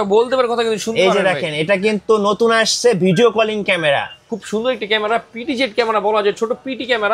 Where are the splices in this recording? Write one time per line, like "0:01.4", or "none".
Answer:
0:04.3